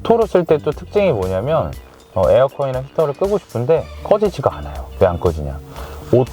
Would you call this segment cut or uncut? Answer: cut